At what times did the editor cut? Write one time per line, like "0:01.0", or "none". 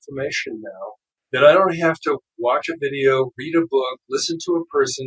0:01.1